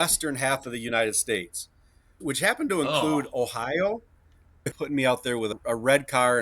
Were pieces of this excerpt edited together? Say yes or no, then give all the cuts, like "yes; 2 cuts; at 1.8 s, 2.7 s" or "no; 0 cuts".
yes; 3 cuts; at 2.1 s, 4.6 s, 5.5 s